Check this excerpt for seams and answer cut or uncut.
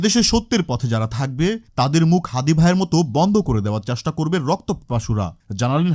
uncut